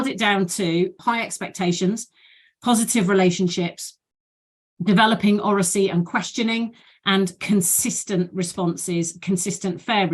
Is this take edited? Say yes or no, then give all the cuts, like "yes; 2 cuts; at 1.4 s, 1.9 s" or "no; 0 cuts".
yes; 1 cut; at 1.0 s